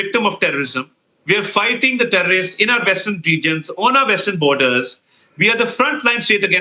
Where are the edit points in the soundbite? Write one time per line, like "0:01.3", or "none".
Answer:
none

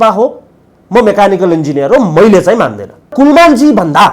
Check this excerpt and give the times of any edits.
0:03.1

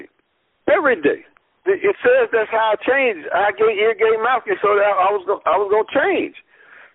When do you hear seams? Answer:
0:01.6

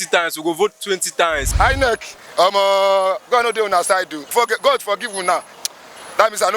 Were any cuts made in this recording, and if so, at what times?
0:01.4
0:04.3

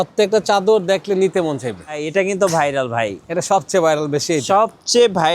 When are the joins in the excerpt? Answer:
0:02.0

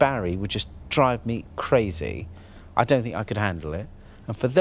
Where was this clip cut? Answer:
none

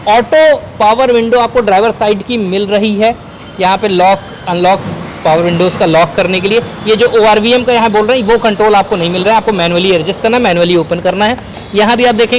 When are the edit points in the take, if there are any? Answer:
none

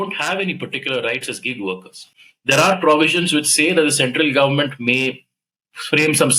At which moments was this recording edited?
none

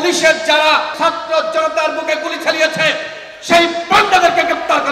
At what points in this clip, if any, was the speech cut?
0:00.9

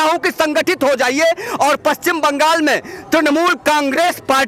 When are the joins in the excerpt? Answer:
none

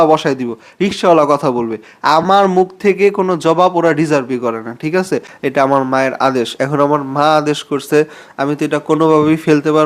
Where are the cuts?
0:05.3

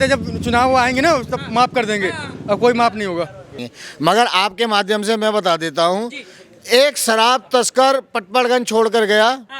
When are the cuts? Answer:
0:03.6

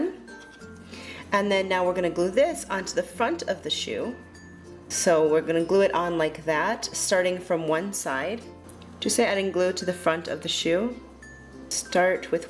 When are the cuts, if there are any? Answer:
none

